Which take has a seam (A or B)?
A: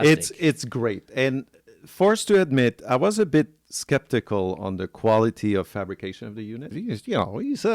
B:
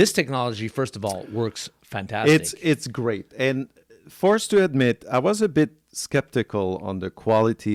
A